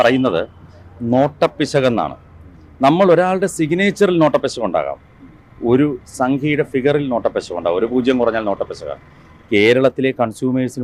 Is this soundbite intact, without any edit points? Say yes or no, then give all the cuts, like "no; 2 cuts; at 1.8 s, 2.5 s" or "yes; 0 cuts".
yes; 0 cuts